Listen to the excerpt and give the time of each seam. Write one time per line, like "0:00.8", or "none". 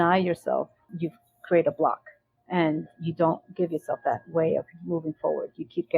0:00.9